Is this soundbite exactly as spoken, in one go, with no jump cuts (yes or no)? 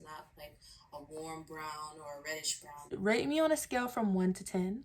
no